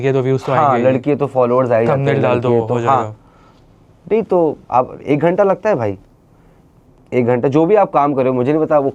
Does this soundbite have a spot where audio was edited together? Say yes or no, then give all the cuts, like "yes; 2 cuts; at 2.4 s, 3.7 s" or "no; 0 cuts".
no; 0 cuts